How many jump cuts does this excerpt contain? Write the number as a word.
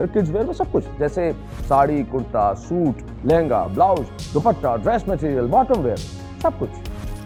zero